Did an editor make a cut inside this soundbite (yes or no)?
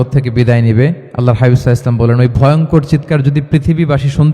yes